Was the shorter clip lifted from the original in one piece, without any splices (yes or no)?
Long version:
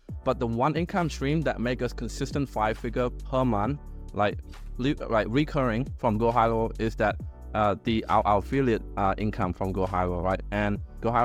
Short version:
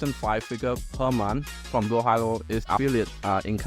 no